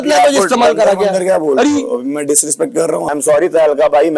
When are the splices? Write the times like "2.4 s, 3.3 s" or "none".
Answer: 3.1 s